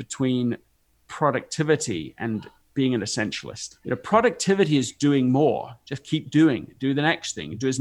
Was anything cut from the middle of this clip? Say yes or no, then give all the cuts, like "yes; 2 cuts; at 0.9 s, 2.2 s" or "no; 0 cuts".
yes; 2 cuts; at 2.6 s, 3.7 s